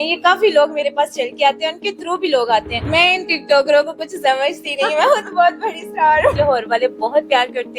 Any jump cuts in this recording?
yes; 2 cuts; at 2.8 s, 6.3 s

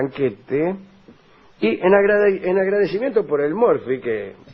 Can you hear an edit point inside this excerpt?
no; 0 cuts

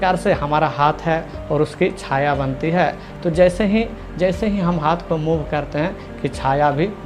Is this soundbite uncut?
yes; 0 cuts

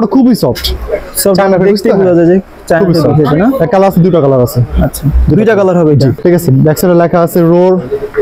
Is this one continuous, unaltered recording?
no; 1 cut; at 6.2 s

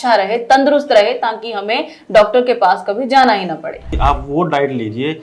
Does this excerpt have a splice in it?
yes; 1 cut; at 3.9 s

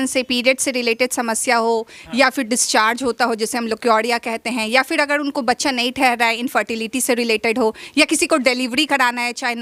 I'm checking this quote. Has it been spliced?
no; 0 cuts

